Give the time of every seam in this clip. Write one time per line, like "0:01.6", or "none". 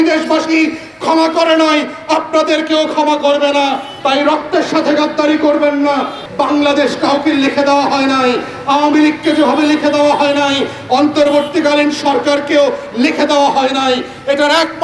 0:06.2